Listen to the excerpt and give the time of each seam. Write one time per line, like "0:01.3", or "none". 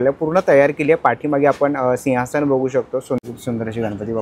0:03.2